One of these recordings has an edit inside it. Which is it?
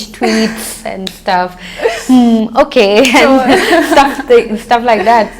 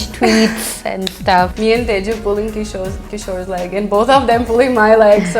second; 1 cut; at 1.5 s

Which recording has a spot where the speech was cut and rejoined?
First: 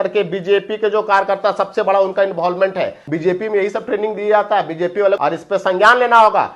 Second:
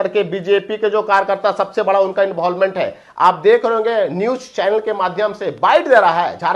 first; 2 cuts; at 3.0 s, 5.2 s

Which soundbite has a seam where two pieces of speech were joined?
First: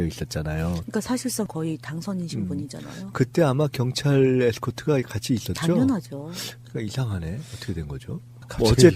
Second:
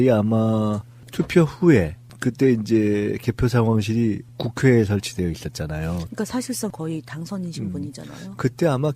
first; 1 cut; at 5.1 s

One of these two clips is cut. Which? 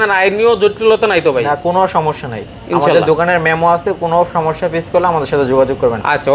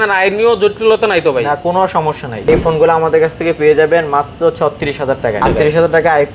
second; 2 cuts; at 2.4 s, 5.4 s

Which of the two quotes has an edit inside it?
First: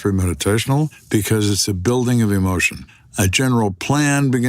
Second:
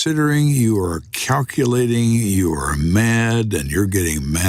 first; 2 cuts; at 1.0 s, 3.0 s

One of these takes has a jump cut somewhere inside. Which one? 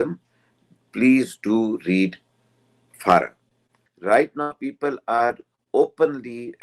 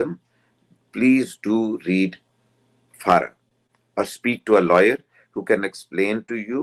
first; 1 cut; at 3.8 s

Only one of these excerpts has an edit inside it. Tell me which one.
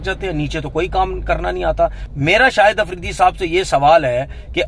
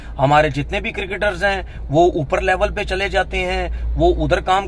first; 1 cut; at 2.0 s

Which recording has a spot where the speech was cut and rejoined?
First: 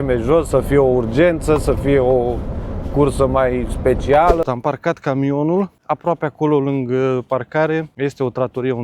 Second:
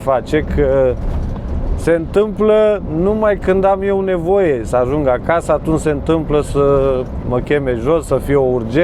first; 3 cuts; at 4.5 s, 5.8 s, 7.9 s

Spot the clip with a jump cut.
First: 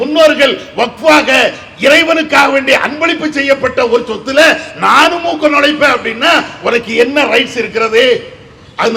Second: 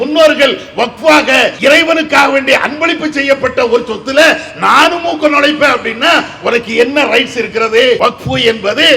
second; 2 cuts; at 1.6 s, 8.0 s

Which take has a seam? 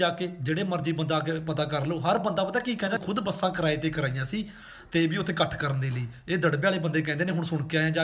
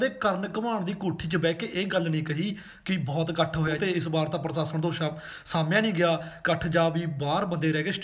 second; 1 cut; at 3.7 s

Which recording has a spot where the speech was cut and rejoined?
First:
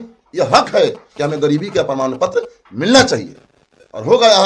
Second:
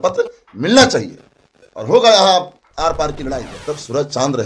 second; 1 cut; at 3.5 s

